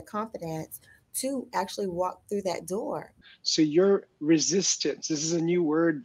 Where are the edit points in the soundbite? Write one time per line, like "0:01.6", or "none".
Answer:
0:03.1